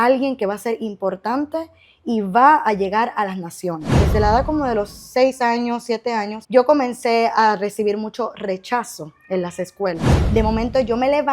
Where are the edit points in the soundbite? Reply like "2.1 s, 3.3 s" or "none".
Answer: 3.9 s, 6.4 s, 10.1 s